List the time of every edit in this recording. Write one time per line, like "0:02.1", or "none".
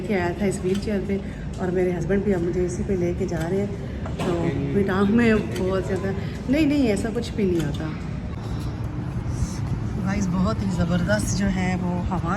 none